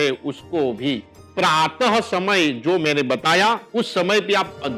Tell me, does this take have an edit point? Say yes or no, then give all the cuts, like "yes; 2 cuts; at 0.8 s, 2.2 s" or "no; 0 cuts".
yes; 2 cuts; at 1.2 s, 3.6 s